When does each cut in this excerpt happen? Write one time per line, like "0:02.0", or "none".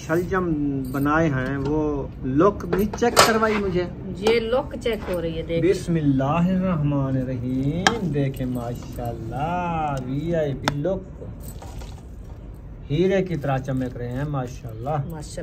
none

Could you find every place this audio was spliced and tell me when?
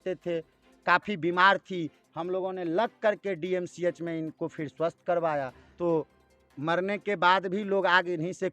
0:05.6

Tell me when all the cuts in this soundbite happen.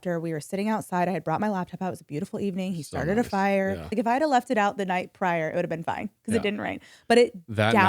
0:03.9

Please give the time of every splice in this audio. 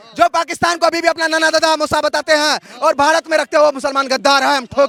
none

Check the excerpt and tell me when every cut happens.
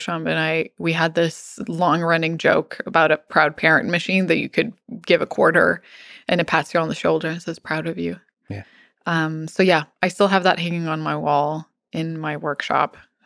none

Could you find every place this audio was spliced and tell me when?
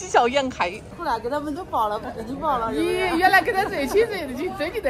0:00.9

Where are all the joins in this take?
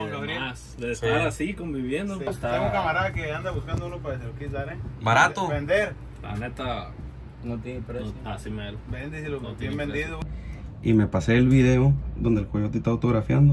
0:02.2
0:10.3

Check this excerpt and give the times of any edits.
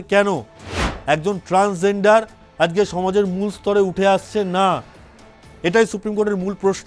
none

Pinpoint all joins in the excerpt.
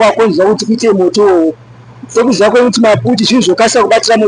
none

